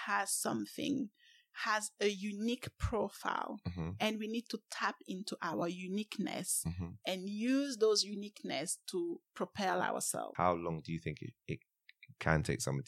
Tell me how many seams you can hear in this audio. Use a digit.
1